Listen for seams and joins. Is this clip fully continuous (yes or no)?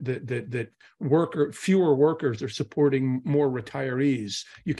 yes